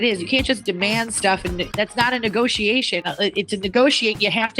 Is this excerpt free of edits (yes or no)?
no